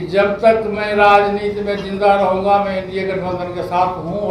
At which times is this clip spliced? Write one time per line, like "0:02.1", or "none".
none

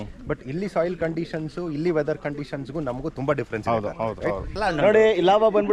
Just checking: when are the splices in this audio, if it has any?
0:04.5

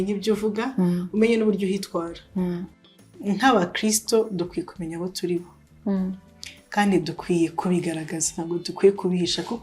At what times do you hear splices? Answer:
0:02.8

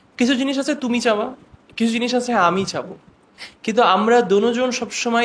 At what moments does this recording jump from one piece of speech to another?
none

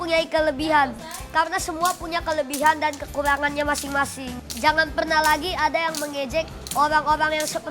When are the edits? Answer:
0:06.6

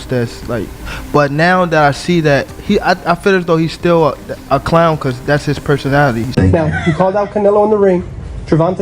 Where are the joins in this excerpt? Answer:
0:06.3

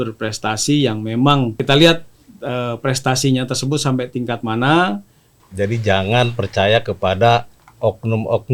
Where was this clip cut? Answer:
0:01.6
0:05.5

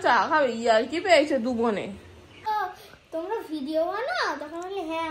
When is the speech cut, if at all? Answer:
0:02.5

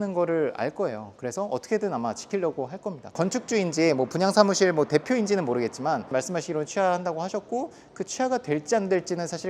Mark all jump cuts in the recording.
0:03.1
0:06.1

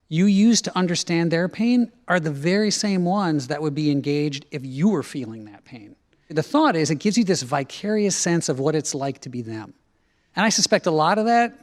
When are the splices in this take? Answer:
0:06.3
0:10.2

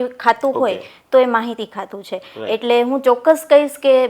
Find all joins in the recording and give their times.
none

